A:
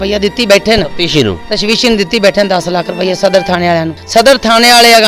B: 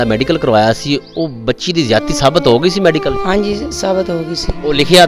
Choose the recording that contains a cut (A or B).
A